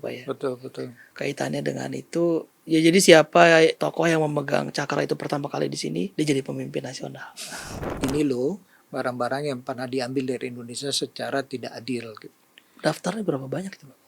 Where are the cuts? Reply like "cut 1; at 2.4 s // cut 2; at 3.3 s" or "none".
cut 1; at 3.8 s // cut 2; at 6.1 s // cut 3; at 7.8 s